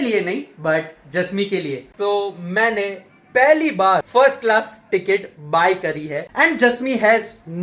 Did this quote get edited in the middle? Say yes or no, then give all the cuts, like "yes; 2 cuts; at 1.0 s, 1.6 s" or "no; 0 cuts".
yes; 3 cuts; at 1.9 s, 4.1 s, 6.3 s